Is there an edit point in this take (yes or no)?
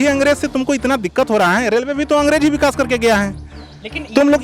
no